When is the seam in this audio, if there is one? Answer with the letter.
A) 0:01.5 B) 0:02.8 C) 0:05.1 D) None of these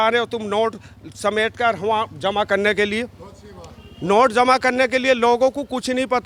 D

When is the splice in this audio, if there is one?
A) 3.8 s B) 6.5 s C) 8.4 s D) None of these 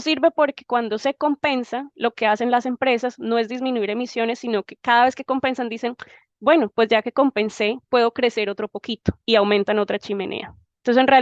D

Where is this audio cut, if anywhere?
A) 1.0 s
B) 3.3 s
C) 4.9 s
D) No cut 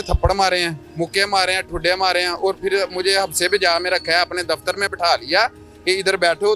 D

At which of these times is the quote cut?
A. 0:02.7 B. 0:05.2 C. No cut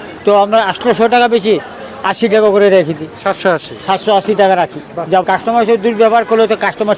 B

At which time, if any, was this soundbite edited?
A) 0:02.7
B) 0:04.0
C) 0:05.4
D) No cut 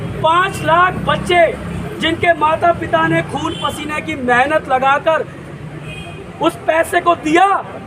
D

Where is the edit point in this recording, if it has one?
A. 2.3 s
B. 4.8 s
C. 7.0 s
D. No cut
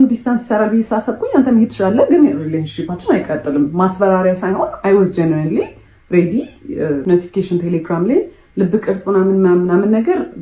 C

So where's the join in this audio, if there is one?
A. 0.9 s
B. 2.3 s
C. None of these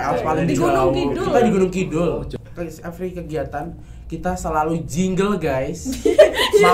B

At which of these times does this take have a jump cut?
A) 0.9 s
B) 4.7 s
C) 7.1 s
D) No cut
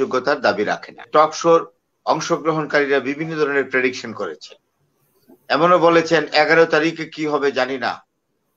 A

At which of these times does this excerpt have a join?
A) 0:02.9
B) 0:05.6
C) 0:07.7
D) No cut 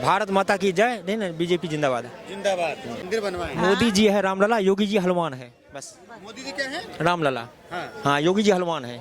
A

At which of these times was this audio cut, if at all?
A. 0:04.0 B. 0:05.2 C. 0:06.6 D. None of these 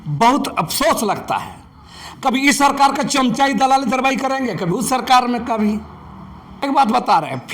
C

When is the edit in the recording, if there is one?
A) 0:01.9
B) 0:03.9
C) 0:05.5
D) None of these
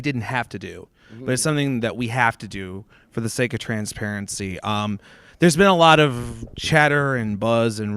A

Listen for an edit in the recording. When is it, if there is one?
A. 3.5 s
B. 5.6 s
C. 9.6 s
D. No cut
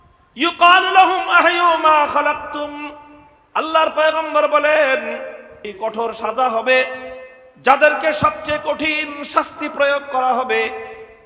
B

